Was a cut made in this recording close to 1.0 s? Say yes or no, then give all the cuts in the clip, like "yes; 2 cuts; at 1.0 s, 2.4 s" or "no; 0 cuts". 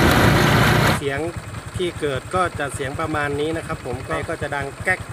yes; 2 cuts; at 1.0 s, 4.2 s